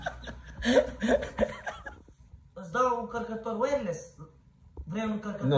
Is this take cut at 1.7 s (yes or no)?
yes